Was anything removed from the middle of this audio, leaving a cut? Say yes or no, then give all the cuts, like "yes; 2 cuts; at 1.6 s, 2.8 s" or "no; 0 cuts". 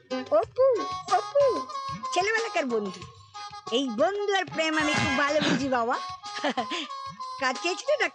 no; 0 cuts